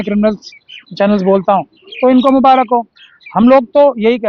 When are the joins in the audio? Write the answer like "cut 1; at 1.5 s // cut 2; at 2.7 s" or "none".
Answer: none